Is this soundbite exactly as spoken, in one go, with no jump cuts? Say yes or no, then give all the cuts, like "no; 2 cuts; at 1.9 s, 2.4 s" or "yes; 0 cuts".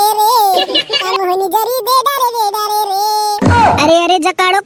yes; 0 cuts